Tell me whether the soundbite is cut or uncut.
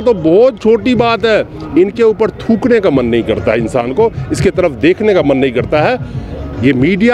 uncut